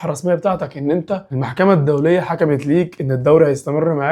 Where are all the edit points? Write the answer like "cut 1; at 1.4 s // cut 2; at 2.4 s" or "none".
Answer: none